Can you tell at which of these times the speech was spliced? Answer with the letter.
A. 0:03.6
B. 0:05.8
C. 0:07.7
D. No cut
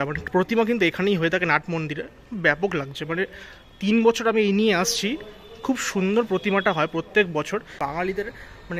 C